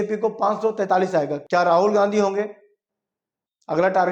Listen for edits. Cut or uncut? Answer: cut